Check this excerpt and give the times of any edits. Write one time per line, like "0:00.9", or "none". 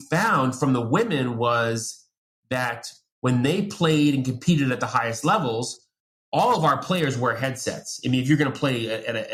none